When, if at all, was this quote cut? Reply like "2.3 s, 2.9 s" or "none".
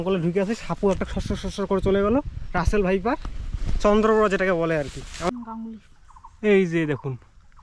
5.3 s